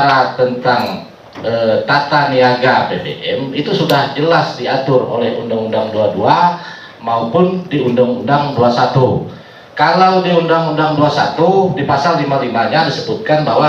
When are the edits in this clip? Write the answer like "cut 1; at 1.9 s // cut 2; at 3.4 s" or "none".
none